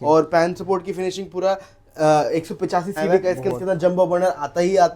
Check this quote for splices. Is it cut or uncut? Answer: cut